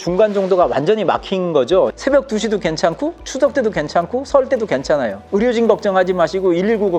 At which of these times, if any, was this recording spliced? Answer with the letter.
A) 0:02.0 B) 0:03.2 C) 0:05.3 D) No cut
A